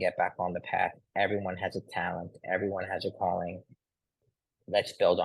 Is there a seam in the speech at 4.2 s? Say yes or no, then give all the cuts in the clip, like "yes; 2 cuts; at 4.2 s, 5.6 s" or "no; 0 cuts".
yes; 1 cut; at 4.2 s